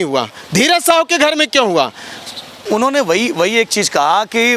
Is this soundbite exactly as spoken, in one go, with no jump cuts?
no; 1 cut; at 2.5 s

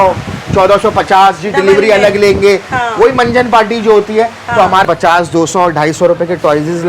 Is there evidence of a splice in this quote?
yes; 1 cut; at 4.9 s

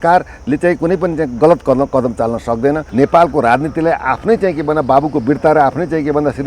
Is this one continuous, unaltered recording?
no; 1 cut; at 2.8 s

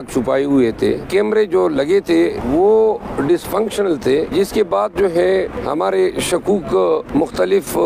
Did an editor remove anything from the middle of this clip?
yes; 5 cuts; at 1.0 s, 2.4 s, 4.3 s, 5.6 s, 7.1 s

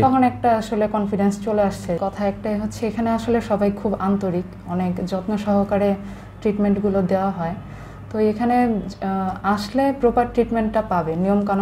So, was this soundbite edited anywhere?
yes; 1 cut; at 2.0 s

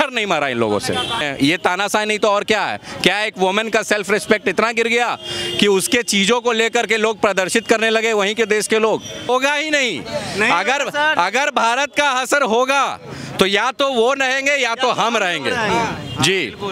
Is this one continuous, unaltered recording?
no; 2 cuts; at 1.2 s, 9.3 s

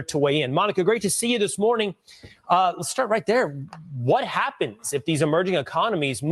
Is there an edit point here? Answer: yes; 1 cut; at 3.1 s

